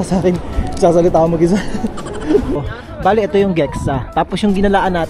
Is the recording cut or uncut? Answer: cut